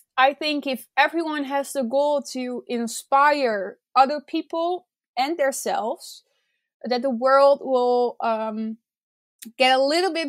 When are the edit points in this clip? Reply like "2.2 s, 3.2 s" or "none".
none